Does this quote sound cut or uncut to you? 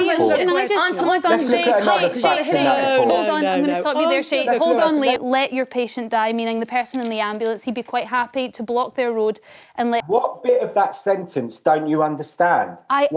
cut